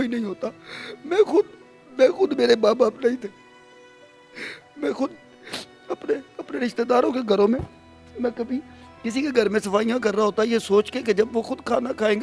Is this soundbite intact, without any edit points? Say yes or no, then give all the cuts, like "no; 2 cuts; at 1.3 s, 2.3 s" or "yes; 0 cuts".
yes; 0 cuts